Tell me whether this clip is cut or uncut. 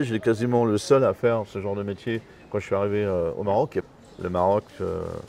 cut